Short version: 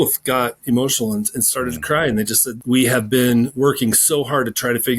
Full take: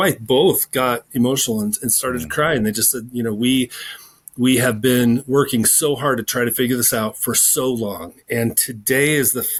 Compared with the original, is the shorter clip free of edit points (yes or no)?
no